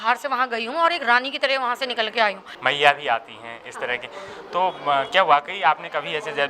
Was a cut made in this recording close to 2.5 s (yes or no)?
yes